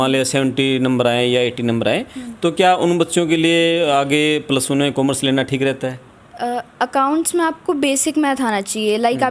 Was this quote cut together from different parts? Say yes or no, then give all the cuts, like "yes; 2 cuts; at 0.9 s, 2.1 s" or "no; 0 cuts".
no; 0 cuts